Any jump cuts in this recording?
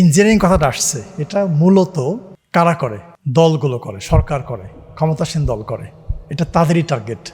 yes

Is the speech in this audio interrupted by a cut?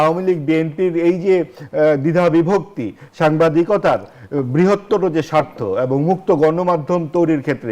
no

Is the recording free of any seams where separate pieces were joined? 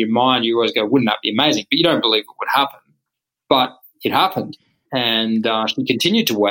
yes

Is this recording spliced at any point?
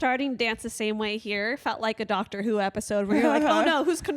no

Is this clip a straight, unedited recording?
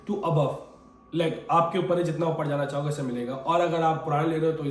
yes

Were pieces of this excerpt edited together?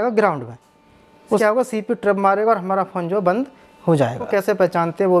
yes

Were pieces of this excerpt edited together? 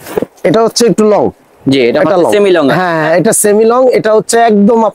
no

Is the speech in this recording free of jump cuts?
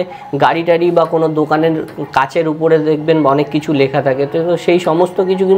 yes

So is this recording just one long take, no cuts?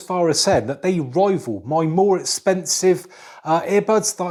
yes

